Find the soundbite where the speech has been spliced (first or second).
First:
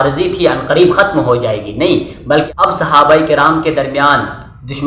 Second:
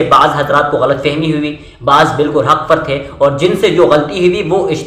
first